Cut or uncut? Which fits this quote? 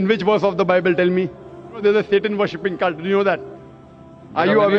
cut